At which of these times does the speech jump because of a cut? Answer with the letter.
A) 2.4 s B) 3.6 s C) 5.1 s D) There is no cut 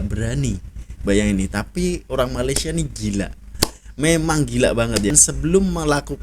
C